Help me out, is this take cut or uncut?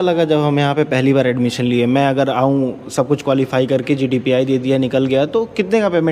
uncut